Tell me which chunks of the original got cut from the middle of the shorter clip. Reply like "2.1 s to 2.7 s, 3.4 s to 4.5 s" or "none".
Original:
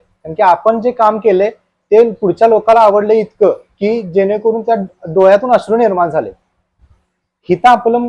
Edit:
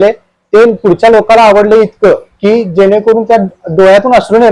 none